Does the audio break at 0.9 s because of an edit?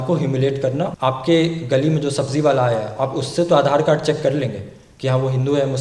yes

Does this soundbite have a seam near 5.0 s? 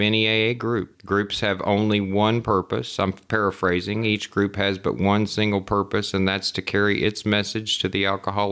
no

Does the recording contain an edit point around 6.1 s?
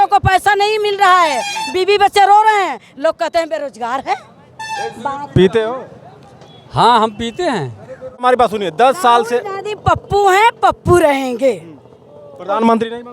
no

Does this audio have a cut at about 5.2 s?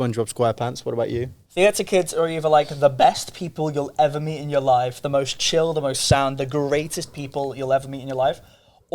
no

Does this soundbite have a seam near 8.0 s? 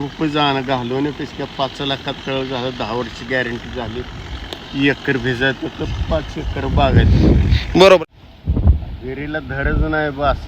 yes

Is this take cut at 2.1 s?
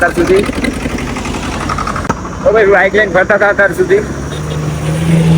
yes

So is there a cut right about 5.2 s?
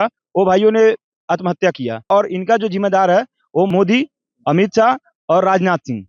no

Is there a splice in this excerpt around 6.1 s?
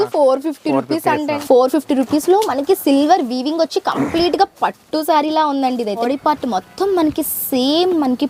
yes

